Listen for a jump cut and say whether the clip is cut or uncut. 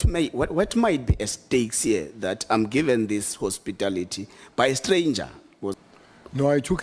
cut